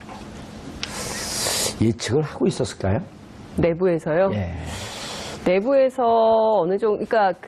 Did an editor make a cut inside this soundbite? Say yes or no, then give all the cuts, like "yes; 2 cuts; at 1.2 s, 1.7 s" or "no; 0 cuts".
yes; 1 cut; at 4.0 s